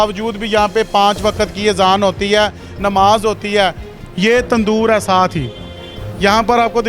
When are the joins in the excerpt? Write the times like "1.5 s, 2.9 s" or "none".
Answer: 3.9 s